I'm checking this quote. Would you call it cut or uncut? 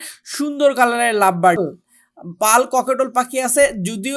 cut